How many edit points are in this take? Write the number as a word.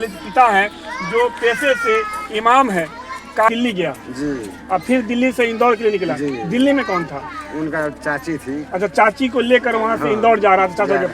one